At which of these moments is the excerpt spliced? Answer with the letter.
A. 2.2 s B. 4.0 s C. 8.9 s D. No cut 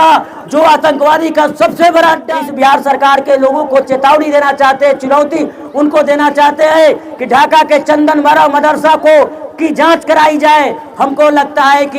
A